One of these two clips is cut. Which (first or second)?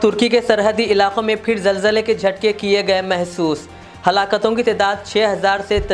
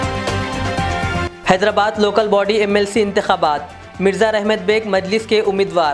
second